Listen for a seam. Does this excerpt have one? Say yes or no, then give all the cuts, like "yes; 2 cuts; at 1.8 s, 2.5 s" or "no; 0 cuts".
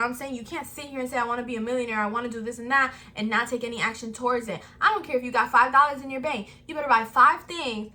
no; 0 cuts